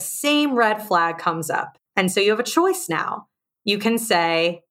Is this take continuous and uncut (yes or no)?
no